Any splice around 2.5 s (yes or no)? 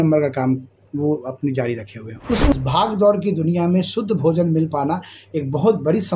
yes